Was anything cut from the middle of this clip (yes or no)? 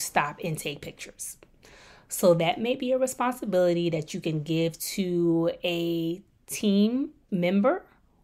yes